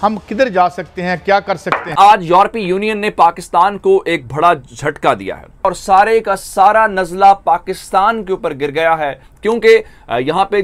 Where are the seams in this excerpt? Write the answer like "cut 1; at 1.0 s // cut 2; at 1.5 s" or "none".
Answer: cut 1; at 1.9 s // cut 2; at 5.7 s // cut 3; at 9.3 s